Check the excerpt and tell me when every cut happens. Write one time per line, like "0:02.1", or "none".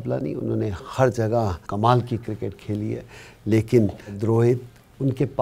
0:01.6
0:04.2